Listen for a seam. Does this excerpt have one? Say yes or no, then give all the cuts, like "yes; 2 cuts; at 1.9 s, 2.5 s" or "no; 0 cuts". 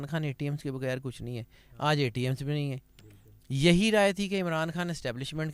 no; 0 cuts